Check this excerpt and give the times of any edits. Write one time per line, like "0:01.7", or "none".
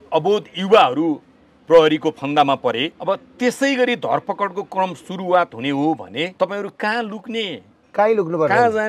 0:02.9
0:06.3